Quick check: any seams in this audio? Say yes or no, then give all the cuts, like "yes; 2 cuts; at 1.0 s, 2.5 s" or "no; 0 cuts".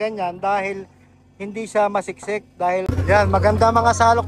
yes; 1 cut; at 2.8 s